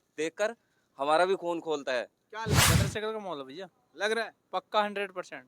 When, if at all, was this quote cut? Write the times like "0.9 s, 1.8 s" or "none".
2.5 s